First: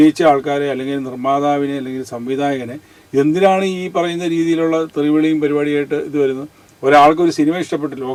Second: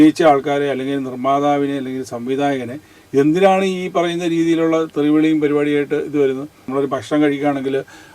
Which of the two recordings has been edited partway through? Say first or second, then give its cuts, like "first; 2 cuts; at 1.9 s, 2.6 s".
second; 1 cut; at 6.6 s